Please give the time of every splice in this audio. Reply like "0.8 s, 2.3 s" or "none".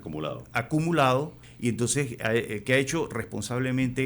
1.4 s